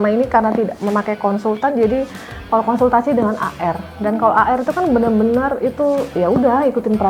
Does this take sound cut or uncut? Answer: cut